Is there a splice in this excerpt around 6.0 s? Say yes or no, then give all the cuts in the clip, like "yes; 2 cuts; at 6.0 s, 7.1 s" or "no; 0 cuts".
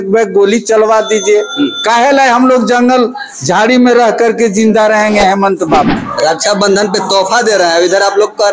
yes; 1 cut; at 6.0 s